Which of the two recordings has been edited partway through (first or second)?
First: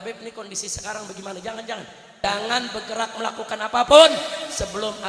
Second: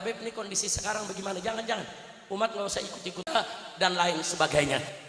first